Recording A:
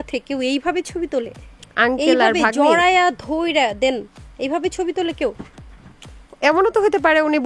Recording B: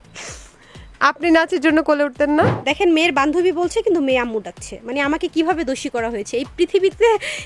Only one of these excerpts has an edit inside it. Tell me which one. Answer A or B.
B